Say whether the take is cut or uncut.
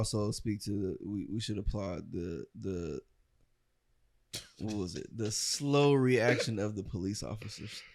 uncut